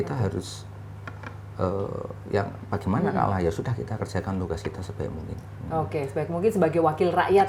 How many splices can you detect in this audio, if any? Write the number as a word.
zero